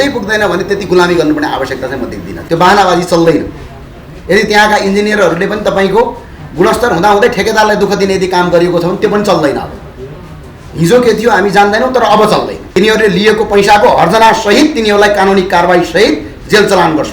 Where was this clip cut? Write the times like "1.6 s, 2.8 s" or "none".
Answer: 2.3 s, 12.6 s